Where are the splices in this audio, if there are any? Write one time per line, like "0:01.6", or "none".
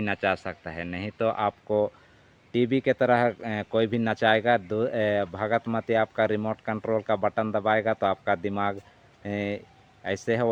none